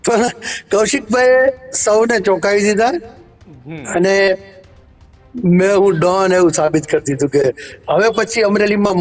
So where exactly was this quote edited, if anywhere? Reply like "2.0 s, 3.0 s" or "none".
none